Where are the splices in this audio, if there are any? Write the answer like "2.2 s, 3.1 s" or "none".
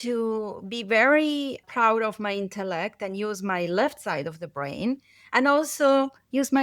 none